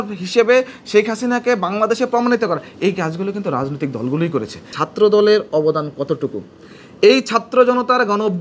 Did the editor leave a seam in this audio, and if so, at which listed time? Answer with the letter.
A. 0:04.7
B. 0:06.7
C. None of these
A